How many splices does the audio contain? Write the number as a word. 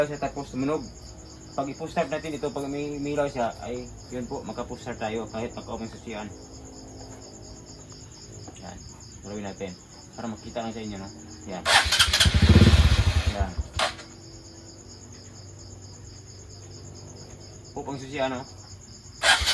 zero